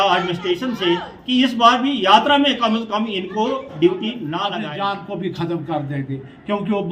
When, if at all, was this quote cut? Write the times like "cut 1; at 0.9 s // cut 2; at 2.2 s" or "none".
cut 1; at 4.5 s